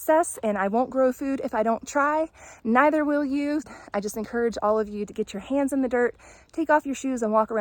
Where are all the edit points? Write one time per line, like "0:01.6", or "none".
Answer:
0:03.7